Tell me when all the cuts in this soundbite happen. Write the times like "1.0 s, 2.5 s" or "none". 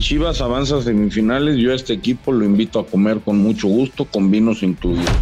none